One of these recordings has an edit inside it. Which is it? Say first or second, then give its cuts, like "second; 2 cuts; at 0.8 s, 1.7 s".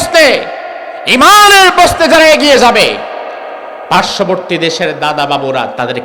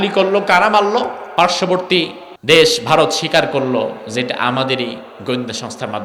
second; 2 cuts; at 1.2 s, 2.2 s